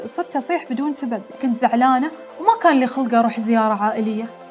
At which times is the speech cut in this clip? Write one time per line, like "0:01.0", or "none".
0:01.4